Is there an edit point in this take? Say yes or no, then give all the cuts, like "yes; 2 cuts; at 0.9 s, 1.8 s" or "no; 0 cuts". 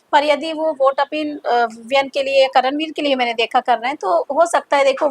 no; 0 cuts